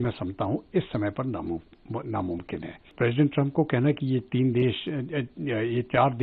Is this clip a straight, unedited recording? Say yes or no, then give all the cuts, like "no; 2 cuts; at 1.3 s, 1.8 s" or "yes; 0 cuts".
no; 1 cut; at 2.9 s